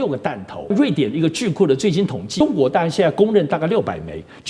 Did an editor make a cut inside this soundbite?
yes; 2 cuts; at 0.7 s, 2.4 s

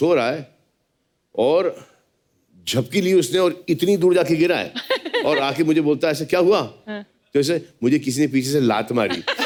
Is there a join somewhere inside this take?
no; 0 cuts

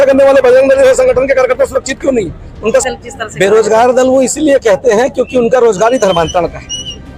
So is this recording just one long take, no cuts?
no; 1 cut; at 2.8 s

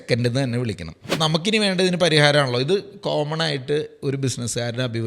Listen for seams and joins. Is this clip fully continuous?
no; 1 cut; at 1.0 s

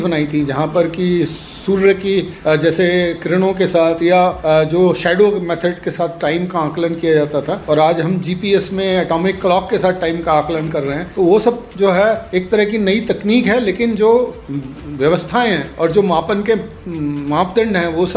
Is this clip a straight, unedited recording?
no; 6 cuts; at 2.3 s, 4.4 s, 7.6 s, 11.0 s, 12.2 s, 15.7 s

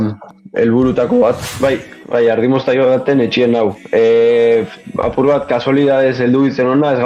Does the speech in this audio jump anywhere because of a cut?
yes; 1 cut; at 1.5 s

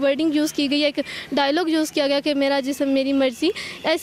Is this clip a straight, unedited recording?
yes; 0 cuts

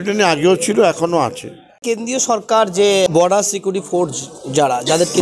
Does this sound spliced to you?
yes; 2 cuts; at 1.9 s, 3.1 s

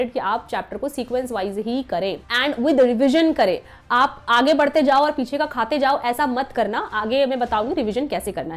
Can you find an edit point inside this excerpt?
no; 0 cuts

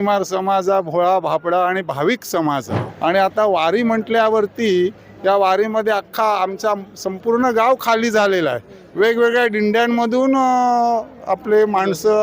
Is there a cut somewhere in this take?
yes; 1 cut; at 2.8 s

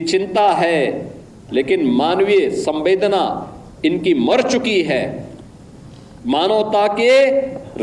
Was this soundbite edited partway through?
no; 0 cuts

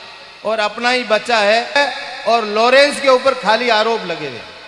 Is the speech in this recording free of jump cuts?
no; 1 cut; at 1.8 s

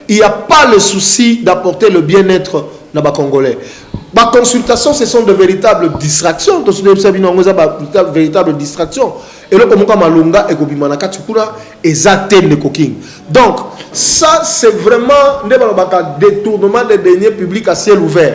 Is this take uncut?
yes; 0 cuts

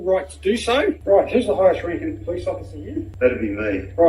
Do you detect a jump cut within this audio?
yes; 2 cuts; at 1.0 s, 3.1 s

